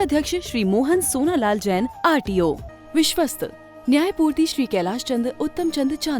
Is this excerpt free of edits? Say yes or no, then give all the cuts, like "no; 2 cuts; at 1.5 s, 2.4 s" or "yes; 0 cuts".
no; 1 cut; at 2.7 s